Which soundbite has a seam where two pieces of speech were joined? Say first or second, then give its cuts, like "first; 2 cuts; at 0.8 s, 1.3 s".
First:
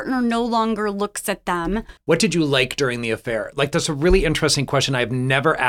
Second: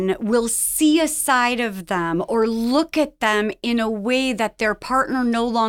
first; 1 cut; at 1.9 s